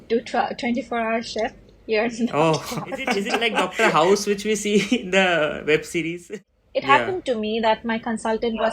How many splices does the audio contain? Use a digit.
2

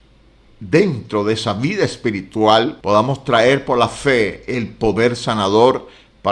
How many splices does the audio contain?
1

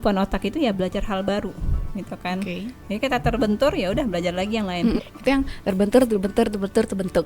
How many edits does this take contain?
1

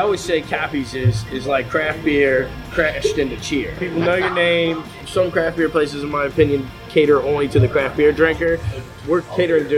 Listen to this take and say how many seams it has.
3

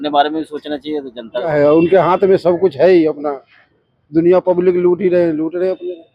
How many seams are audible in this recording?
1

